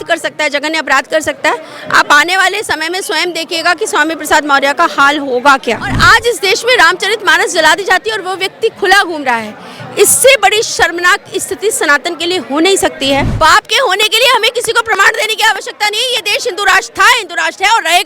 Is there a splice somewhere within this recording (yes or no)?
yes